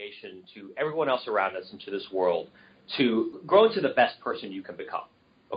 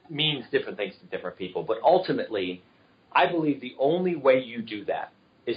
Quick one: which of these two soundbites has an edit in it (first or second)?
first